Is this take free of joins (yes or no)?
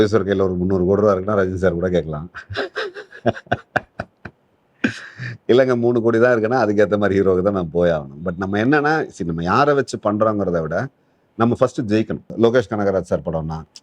no